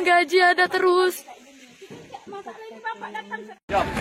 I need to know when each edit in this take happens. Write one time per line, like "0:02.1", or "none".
none